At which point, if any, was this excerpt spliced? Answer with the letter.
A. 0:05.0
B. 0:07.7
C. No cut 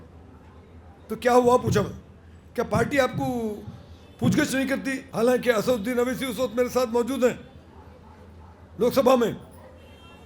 A